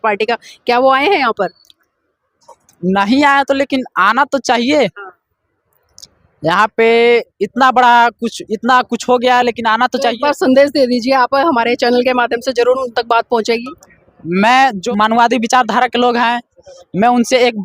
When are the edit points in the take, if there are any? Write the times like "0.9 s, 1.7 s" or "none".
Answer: 14.8 s